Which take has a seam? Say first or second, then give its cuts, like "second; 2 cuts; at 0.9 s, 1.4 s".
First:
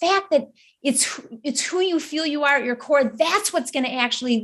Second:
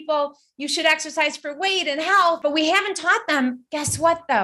second; 1 cut; at 2.4 s